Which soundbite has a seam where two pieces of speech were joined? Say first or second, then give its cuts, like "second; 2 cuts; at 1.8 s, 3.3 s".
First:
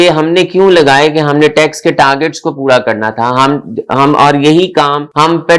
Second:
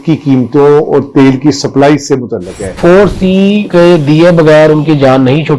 second; 1 cut; at 2.8 s